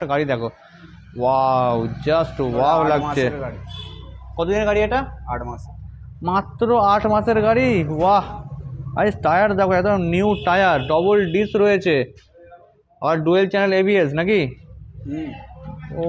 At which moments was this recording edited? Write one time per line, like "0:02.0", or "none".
none